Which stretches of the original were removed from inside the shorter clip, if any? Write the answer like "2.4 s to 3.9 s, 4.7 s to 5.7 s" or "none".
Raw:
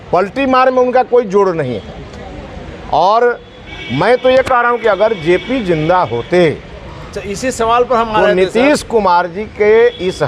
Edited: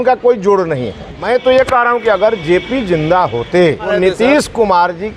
2.0 s to 3.9 s, 6.7 s to 8.2 s